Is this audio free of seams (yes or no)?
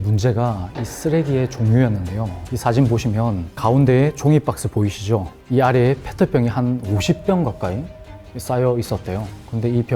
no